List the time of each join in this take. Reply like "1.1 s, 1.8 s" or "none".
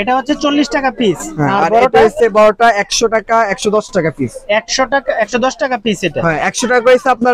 none